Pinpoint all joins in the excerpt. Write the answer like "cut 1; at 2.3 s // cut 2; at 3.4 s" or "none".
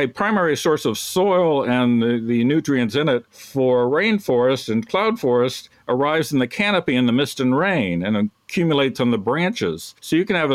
none